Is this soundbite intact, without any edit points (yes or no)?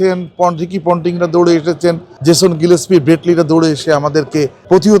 yes